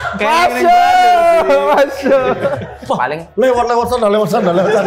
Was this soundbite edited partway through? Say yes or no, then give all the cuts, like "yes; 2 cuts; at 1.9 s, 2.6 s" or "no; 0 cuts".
yes; 1 cut; at 2.7 s